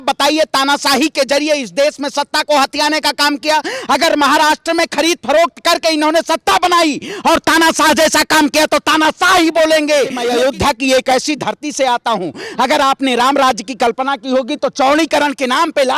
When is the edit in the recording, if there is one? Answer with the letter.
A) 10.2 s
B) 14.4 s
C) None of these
A